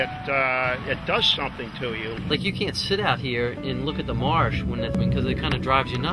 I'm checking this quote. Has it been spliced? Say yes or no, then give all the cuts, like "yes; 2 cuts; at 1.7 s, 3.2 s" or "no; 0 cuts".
yes; 2 cuts; at 2.2 s, 4.9 s